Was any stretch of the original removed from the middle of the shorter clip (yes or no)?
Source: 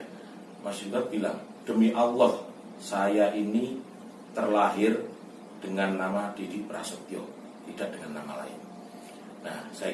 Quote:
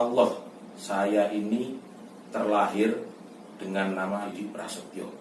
yes